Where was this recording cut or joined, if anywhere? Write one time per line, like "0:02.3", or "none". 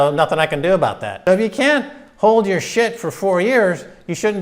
0:01.1